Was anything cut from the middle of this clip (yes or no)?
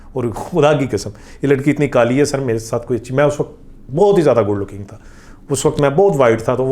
no